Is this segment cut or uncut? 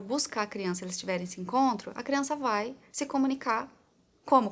uncut